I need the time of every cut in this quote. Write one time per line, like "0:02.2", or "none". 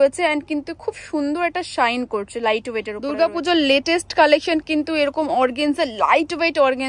0:03.0